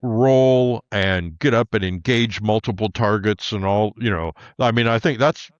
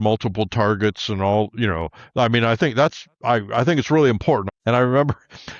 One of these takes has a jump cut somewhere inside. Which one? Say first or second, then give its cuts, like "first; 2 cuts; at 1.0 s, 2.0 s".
second; 1 cut; at 4.4 s